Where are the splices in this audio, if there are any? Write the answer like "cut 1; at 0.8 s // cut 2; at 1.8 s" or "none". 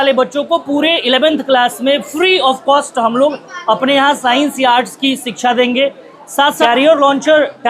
cut 1; at 6.6 s